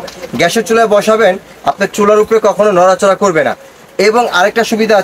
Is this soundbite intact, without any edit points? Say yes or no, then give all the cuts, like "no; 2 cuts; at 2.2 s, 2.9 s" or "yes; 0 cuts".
yes; 0 cuts